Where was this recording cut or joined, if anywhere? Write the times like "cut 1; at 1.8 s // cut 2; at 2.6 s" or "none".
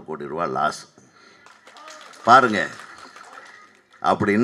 none